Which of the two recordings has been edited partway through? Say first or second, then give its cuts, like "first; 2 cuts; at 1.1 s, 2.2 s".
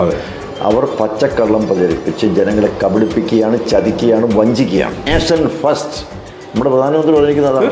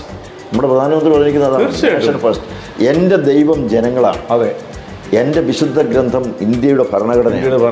first; 1 cut; at 5.1 s